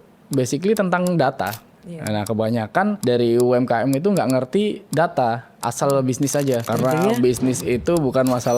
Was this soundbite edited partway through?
yes; 4 cuts; at 1.7 s, 3.0 s, 4.8 s, 6.7 s

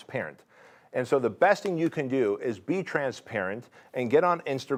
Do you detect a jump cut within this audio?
no; 0 cuts

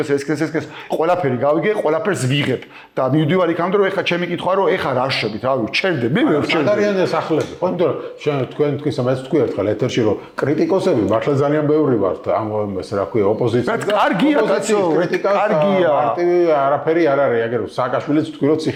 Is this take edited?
no; 0 cuts

